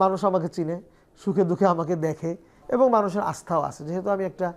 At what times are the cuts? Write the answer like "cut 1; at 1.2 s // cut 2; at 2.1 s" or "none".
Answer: cut 1; at 2.5 s